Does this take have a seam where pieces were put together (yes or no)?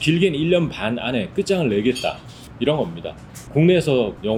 no